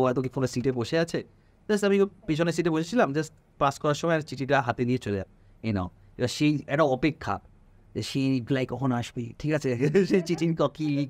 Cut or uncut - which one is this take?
uncut